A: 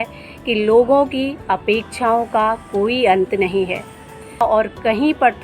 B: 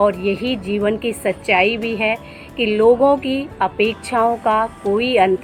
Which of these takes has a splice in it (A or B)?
A